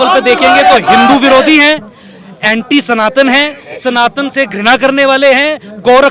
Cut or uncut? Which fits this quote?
uncut